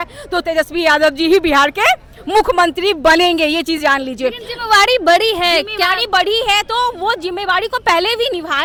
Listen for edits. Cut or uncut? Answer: uncut